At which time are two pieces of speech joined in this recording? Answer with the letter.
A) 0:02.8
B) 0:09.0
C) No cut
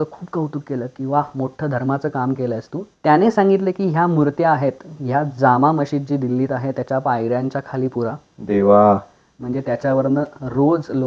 A